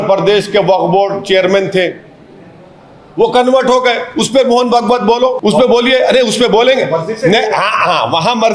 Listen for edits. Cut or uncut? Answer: cut